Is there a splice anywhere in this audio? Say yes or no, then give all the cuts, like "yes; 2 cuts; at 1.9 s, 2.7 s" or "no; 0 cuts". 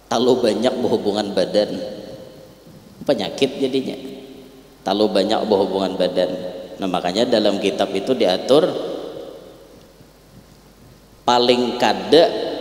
no; 0 cuts